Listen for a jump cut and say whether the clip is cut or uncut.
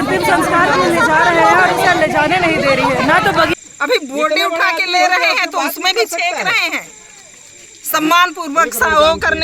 cut